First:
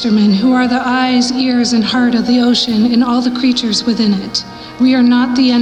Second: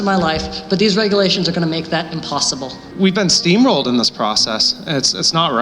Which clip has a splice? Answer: second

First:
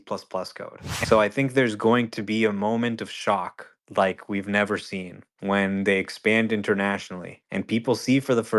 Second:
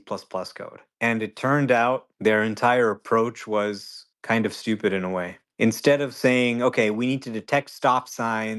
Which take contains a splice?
first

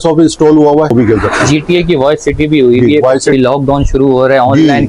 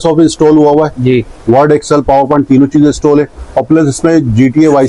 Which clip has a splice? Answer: first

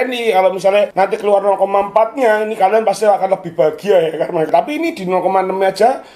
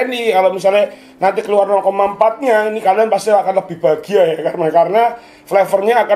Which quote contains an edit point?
first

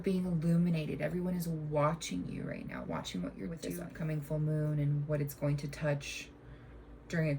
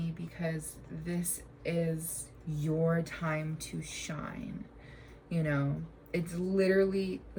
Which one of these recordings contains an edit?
first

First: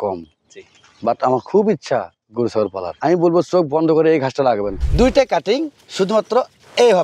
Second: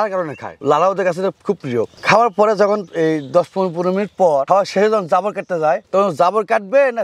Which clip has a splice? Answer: first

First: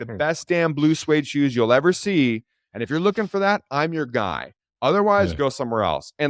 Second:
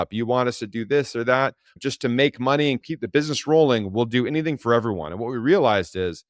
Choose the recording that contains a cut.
second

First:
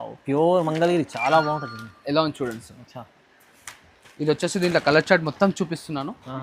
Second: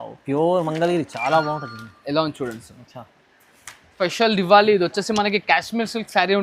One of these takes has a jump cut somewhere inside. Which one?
second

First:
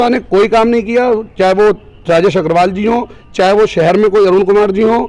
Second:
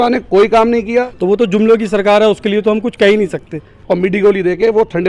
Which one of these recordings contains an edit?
second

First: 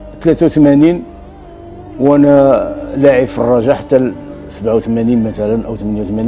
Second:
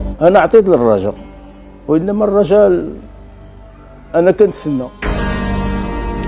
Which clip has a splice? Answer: second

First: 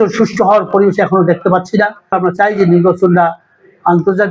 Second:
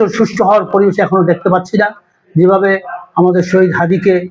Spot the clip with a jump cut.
first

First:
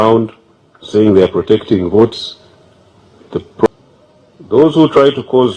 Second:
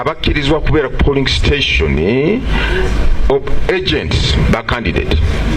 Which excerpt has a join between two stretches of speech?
first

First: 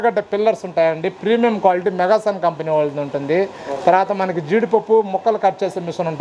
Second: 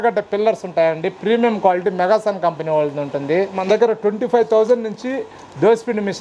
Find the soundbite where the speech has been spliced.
second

